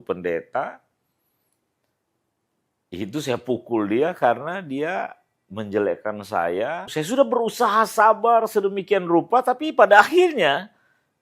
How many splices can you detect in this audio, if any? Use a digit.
1